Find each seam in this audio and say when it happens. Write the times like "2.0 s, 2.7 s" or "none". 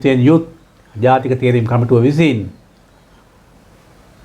none